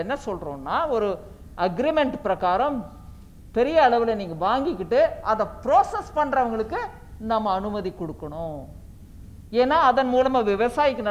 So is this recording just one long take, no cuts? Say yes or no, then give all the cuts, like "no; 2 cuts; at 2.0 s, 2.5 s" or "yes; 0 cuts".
yes; 0 cuts